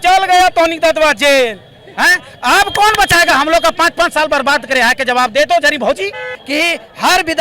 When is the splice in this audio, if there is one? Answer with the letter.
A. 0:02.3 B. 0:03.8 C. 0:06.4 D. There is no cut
C